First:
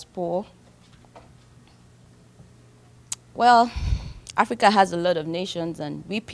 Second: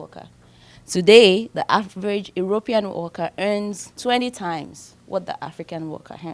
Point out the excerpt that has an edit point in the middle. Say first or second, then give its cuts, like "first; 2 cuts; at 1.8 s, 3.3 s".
second; 1 cut; at 3.9 s